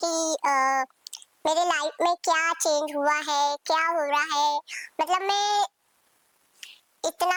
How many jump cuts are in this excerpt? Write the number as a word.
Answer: zero